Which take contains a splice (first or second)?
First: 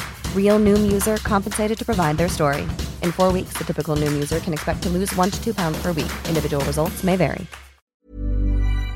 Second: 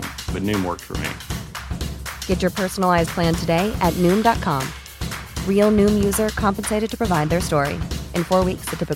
first